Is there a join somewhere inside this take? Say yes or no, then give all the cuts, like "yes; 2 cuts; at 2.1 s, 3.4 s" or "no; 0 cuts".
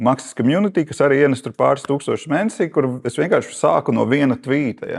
no; 0 cuts